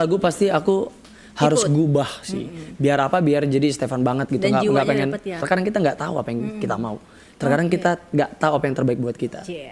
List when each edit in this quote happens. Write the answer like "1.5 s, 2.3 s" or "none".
5.4 s